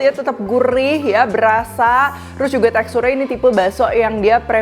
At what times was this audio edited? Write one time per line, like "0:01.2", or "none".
none